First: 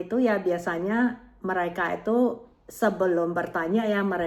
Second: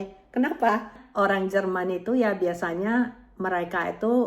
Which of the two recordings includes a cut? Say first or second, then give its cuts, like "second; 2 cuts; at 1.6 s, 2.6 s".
second; 1 cut; at 1.0 s